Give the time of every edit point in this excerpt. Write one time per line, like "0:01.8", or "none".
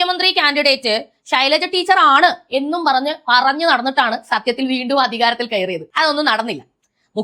0:05.8